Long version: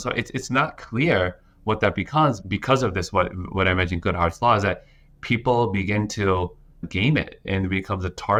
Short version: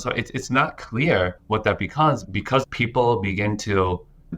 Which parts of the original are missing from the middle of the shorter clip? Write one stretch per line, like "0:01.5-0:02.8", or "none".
0:01.4-0:01.5
0:02.8-0:05.1